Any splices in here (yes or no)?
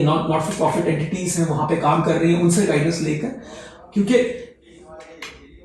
no